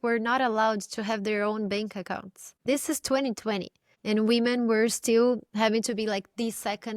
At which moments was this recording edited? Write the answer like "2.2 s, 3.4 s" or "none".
2.6 s